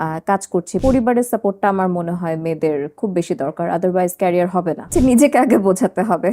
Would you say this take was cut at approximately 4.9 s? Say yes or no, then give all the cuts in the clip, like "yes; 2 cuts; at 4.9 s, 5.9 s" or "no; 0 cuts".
yes; 2 cuts; at 0.8 s, 4.9 s